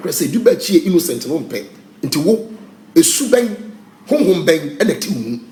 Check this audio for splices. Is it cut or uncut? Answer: uncut